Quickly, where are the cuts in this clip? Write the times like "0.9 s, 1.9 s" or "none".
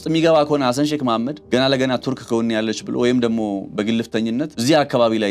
1.4 s, 4.5 s